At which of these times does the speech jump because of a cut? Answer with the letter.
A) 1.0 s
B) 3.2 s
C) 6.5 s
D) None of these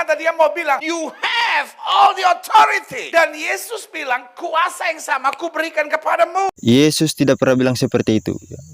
D